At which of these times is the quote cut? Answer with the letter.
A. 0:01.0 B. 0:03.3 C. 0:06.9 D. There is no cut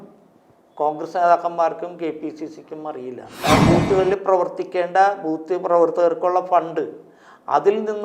B